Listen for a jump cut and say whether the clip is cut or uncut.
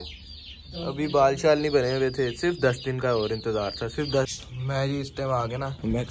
cut